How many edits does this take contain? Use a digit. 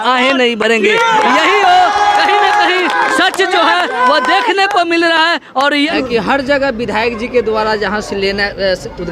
1